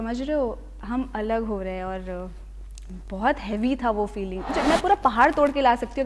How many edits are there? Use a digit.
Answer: 1